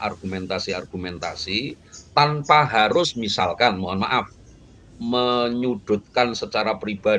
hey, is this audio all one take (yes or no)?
yes